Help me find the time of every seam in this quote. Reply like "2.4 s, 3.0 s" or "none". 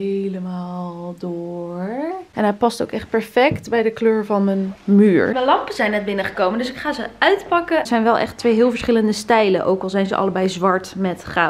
2.2 s, 5.3 s, 7.9 s